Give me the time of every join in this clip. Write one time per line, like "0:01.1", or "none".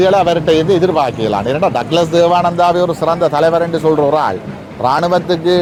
none